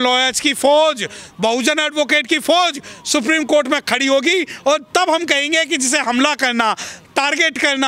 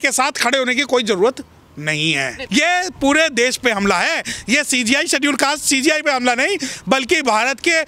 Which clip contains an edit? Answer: second; 1 cut; at 2.4 s

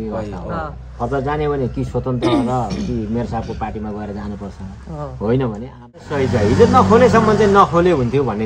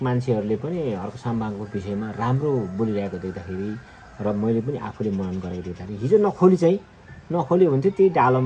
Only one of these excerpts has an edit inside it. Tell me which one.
first; 1 cut; at 5.9 s

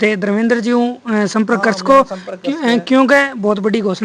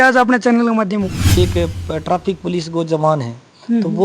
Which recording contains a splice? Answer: second; 1 cut; at 1.3 s

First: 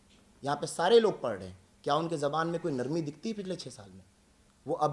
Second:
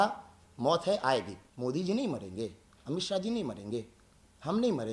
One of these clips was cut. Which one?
second; 1 cut; at 1.4 s

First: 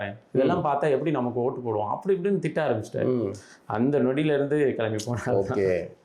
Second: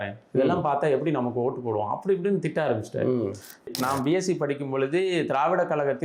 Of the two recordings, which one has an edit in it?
second; 1 cut; at 3.7 s

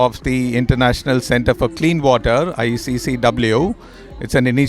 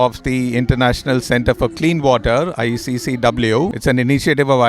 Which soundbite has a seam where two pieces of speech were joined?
second; 1 cut; at 3.8 s

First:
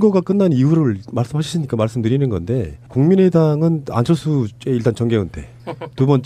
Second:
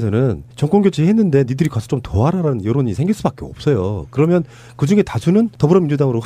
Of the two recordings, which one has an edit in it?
second; 1 cut; at 5.1 s

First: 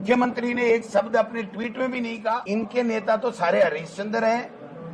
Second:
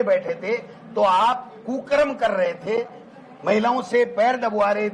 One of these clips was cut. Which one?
first; 1 cut; at 2.4 s

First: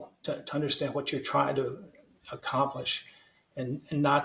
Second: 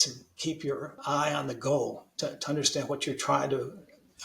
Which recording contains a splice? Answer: second; 1 cut; at 0.9 s

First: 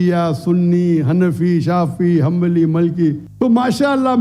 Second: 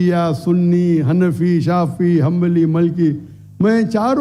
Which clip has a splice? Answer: first; 1 cut; at 3.3 s

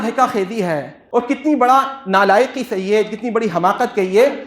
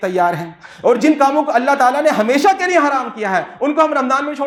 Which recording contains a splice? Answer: first; 1 cut; at 0.9 s

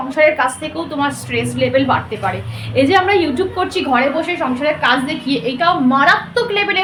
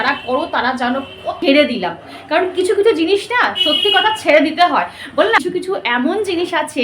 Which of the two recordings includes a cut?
second; 2 cuts; at 1.3 s, 5.4 s

